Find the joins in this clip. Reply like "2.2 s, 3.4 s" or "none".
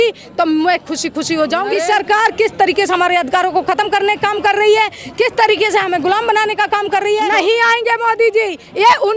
1.7 s, 7.2 s